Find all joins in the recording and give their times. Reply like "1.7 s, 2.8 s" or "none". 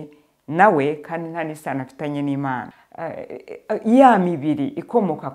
2.8 s